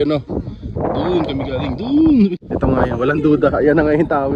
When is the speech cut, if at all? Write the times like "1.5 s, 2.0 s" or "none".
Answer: 2.3 s